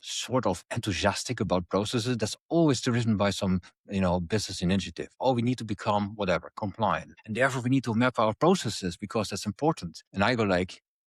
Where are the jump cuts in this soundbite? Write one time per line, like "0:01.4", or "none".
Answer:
0:07.1
0:10.0